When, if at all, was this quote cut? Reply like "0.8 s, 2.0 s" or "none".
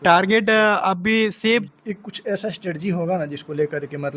1.6 s

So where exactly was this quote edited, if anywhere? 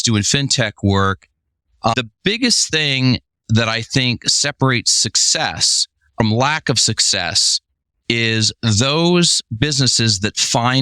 1.9 s, 6.2 s

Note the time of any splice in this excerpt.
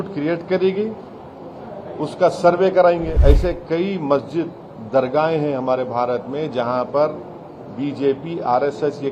3.1 s

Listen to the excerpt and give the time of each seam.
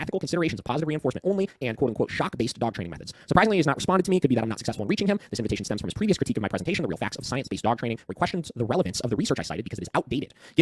none

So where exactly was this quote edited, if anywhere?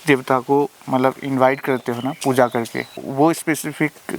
3.0 s

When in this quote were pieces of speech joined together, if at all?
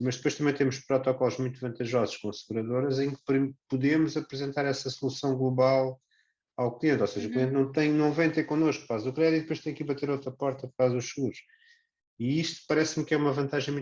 none

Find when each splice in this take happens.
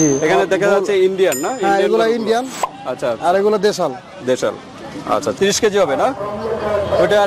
5.4 s

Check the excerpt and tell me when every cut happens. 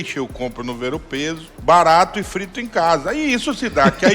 1.5 s

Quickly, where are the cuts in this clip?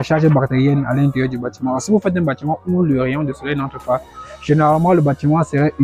none

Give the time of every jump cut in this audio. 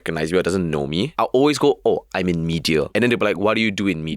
1.1 s, 2.9 s

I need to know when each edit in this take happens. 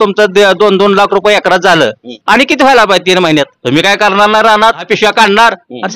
2.1 s, 3.6 s, 4.8 s

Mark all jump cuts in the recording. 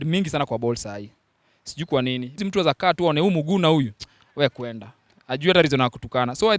2.4 s

